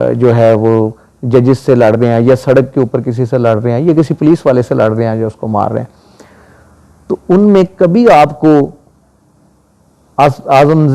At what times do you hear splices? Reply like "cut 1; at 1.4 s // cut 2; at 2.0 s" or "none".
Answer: none